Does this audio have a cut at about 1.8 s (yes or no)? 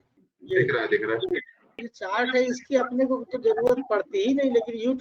yes